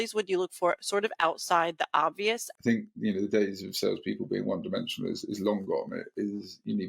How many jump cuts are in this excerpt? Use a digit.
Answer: 1